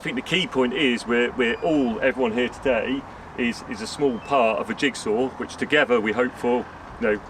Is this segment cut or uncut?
uncut